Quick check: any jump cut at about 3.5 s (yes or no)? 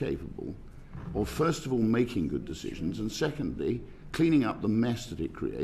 no